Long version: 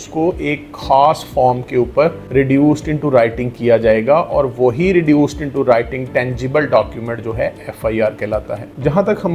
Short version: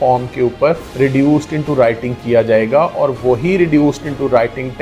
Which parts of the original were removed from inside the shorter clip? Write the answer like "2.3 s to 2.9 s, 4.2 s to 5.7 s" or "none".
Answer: none

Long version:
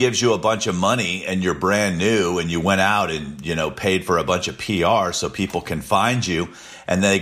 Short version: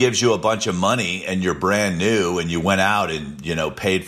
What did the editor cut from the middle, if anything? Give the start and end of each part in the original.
none

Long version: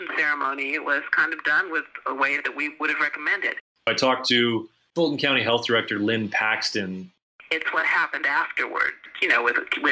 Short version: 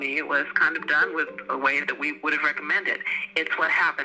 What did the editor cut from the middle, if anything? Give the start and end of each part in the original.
3.6 s to 7.2 s

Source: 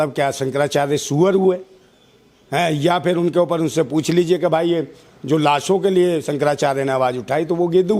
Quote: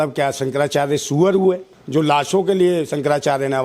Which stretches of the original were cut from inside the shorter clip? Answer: 1.7 s to 5.1 s

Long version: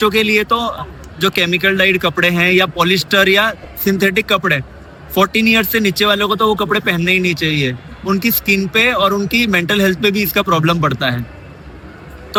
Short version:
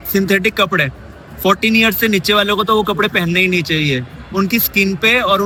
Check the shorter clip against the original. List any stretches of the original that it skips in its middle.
none

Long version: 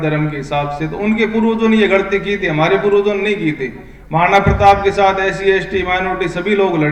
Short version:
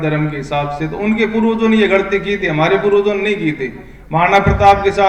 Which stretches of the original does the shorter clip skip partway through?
none

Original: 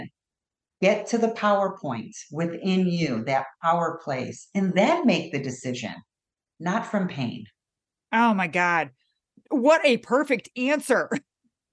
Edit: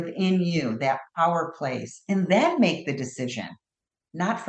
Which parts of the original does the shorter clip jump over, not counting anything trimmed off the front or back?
none

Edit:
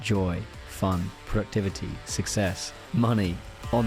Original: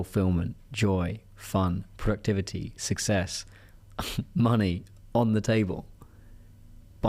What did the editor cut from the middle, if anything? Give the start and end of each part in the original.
3.5 s to 4.2 s

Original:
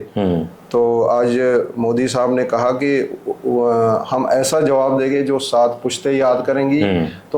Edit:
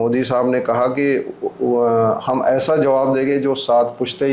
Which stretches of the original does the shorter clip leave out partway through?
none

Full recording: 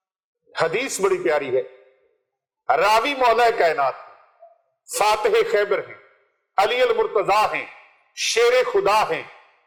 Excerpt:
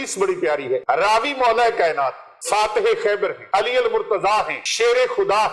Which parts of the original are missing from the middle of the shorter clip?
1.7 s to 2.6 s, 4.1 s to 4.8 s, 5.9 s to 6.4 s, 7.7 s to 8.2 s

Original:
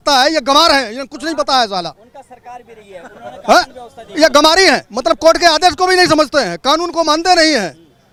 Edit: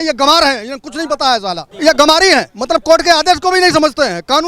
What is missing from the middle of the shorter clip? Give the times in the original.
1.9 s to 4.0 s

